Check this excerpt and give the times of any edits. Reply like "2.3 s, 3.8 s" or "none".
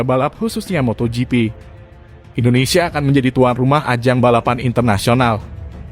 2.2 s